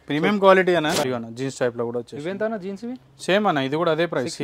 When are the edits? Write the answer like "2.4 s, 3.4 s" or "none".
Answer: 1.1 s